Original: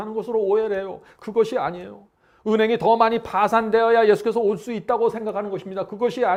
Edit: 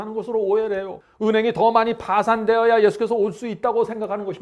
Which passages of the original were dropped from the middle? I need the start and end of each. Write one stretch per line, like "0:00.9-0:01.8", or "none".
0:01.0-0:02.3